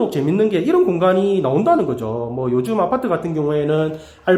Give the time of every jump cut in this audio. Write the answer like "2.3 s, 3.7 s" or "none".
none